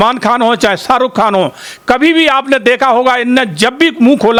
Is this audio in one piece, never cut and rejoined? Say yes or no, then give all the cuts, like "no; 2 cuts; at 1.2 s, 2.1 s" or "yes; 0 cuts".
yes; 0 cuts